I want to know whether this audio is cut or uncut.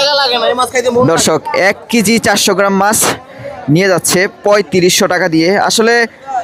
uncut